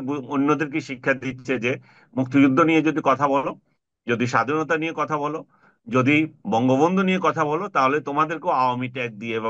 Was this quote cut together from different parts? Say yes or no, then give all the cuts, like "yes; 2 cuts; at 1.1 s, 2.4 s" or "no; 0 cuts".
no; 0 cuts